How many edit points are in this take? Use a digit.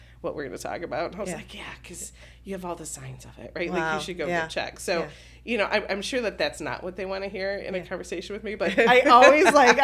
0